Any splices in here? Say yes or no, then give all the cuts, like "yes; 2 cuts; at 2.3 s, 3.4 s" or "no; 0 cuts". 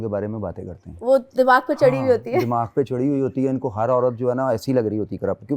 no; 0 cuts